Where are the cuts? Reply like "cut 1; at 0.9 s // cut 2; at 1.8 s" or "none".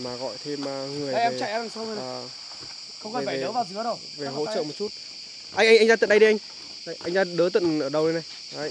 none